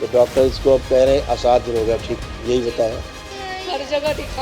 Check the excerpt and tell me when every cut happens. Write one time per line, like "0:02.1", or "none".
0:02.2
0:03.2